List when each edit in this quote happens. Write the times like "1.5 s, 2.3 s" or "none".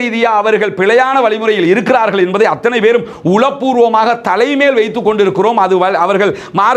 none

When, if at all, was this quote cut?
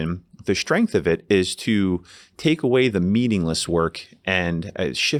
none

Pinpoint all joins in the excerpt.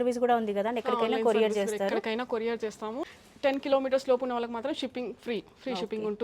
3.0 s

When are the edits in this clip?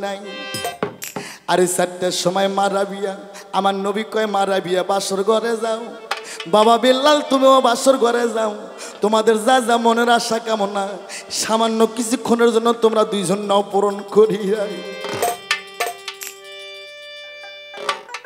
none

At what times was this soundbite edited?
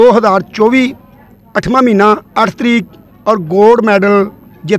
none

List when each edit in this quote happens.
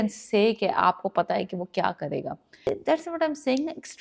2.8 s

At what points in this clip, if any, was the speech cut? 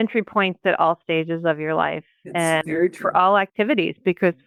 none

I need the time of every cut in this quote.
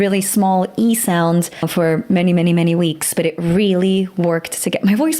1.7 s

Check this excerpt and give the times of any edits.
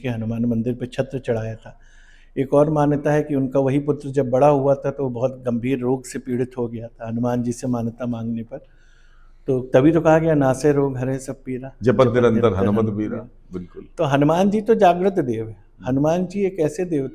none

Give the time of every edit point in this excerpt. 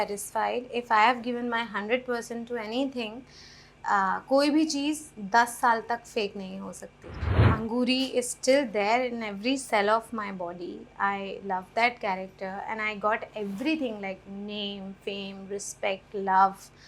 7.4 s

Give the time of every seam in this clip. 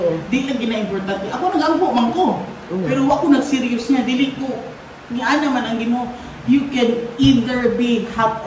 none

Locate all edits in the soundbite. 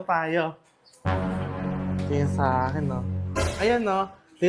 3.4 s

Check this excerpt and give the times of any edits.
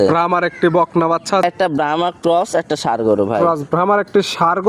1.4 s

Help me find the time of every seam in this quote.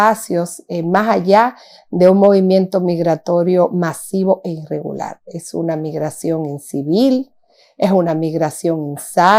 none

